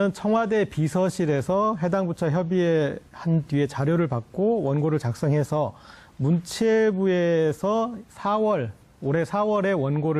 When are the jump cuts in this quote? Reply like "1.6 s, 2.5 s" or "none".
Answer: 1.6 s

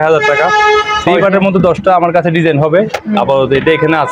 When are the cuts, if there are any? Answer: 1.0 s

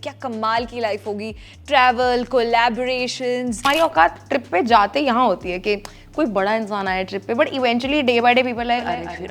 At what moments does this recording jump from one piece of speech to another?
3.6 s

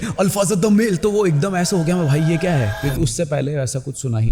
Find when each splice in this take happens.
none

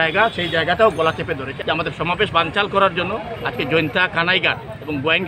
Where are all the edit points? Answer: 1.5 s

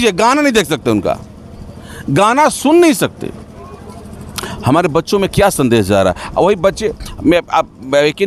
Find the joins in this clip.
none

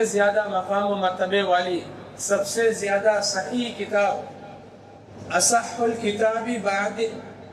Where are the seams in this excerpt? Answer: none

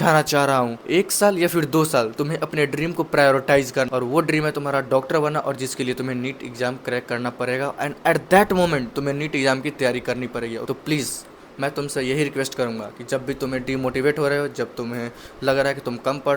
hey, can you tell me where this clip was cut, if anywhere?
none

